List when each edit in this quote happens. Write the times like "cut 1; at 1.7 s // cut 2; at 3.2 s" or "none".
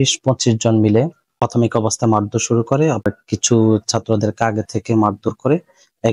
cut 1; at 1.2 s // cut 2; at 3.0 s